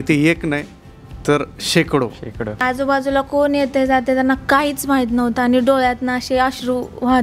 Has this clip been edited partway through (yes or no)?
yes